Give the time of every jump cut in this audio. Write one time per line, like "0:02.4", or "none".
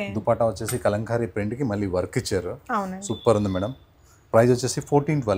none